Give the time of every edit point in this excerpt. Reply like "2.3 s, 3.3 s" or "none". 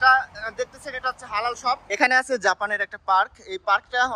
1.8 s

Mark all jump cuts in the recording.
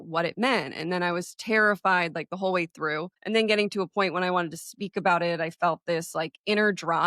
3.1 s

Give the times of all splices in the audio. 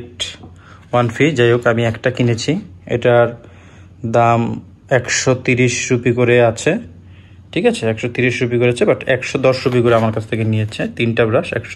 none

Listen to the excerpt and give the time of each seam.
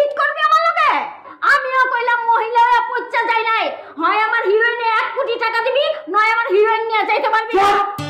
none

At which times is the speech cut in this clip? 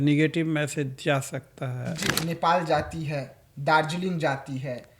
2.1 s

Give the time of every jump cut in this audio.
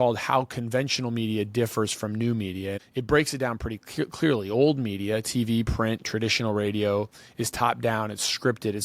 2.8 s

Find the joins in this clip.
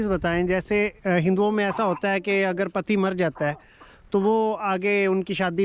0.9 s

